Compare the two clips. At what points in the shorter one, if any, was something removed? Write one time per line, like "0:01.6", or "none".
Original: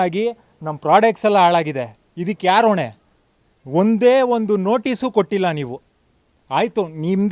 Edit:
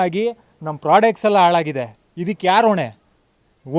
none